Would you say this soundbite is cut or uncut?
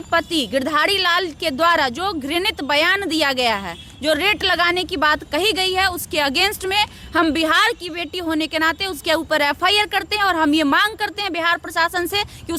uncut